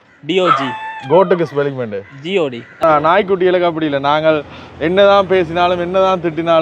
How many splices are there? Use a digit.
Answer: 1